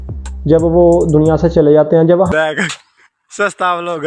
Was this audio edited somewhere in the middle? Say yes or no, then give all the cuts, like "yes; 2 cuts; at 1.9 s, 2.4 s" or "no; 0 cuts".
yes; 1 cut; at 2.3 s